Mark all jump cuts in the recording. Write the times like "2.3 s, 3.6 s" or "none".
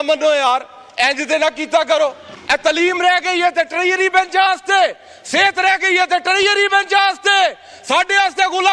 2.3 s